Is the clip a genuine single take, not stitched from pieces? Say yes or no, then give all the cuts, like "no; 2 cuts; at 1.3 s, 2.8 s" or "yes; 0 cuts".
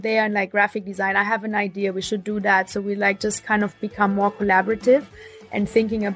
yes; 0 cuts